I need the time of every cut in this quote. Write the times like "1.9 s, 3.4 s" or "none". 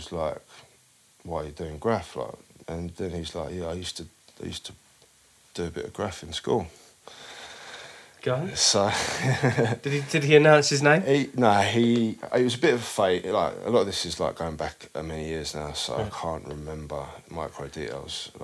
2.5 s